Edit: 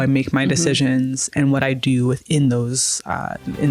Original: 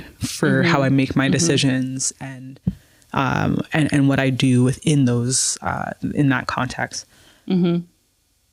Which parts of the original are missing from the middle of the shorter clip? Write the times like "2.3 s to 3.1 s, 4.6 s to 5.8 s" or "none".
2.2 s to 3.9 s